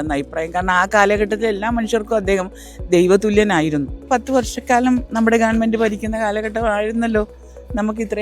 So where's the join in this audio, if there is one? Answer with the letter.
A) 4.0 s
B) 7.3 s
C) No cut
A